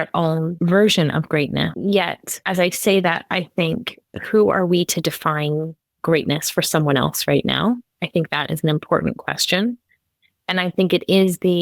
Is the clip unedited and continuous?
no; 1 cut; at 1.7 s

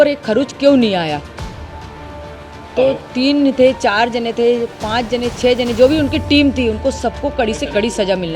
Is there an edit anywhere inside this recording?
no; 0 cuts

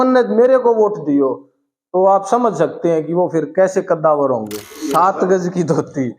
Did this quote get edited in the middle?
yes; 1 cut; at 5.1 s

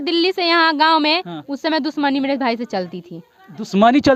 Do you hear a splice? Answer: no; 0 cuts

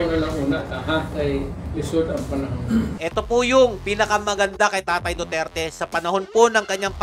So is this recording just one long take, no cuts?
yes; 0 cuts

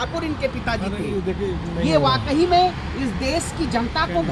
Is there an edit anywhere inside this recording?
no; 0 cuts

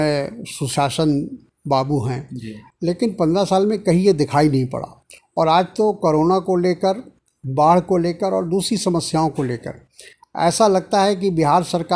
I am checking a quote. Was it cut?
no; 0 cuts

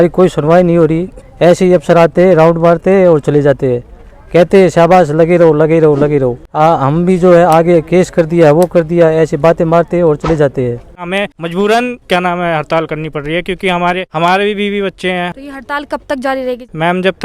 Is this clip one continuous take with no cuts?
no; 2 cuts; at 11.0 s, 15.3 s

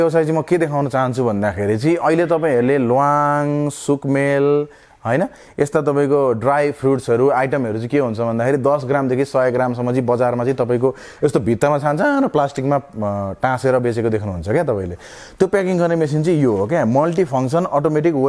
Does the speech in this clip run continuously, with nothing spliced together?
yes; 0 cuts

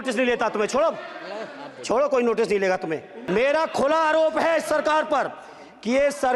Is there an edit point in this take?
yes; 1 cut; at 3.1 s

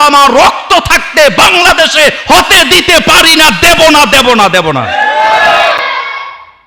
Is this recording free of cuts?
yes; 0 cuts

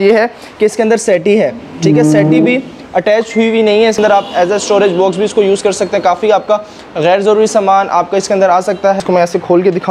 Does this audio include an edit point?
yes; 2 cuts; at 4.0 s, 9.0 s

